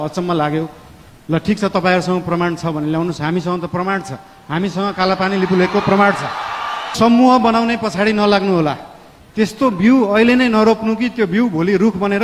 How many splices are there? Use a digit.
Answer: 1